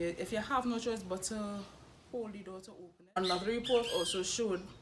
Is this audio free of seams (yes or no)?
no